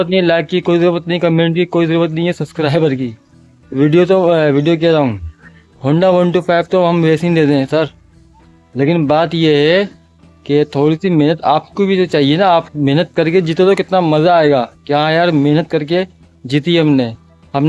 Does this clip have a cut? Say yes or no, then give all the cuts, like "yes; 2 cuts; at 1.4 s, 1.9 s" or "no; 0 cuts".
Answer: no; 0 cuts